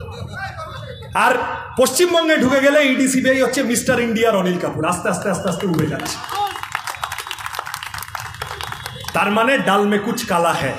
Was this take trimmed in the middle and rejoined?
no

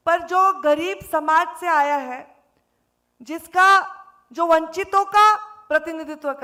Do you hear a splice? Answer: no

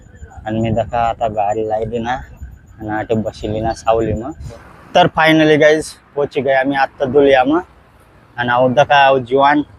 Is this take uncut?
no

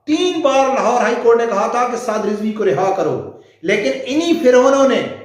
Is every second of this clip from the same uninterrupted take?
yes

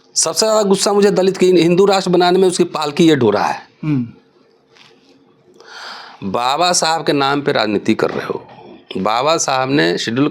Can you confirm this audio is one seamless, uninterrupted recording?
yes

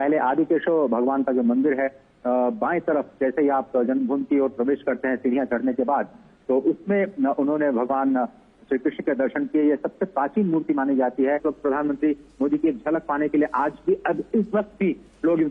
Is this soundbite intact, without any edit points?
no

